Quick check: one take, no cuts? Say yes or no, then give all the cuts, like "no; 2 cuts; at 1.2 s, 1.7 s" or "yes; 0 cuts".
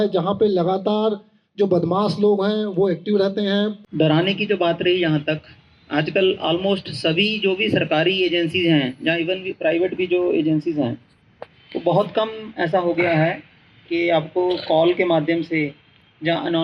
no; 1 cut; at 3.8 s